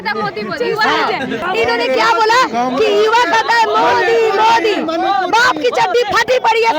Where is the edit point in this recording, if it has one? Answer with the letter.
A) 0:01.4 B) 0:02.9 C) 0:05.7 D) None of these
A